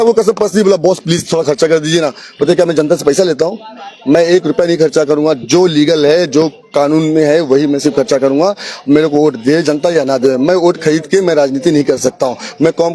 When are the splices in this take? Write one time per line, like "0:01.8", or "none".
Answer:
none